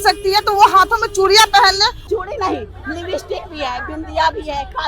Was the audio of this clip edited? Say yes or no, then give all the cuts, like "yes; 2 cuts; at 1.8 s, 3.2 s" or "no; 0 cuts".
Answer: yes; 1 cut; at 2.0 s